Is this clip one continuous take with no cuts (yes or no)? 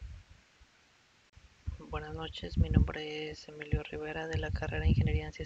no